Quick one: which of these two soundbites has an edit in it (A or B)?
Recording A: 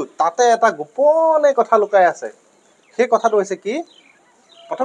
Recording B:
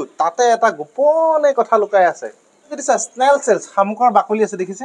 B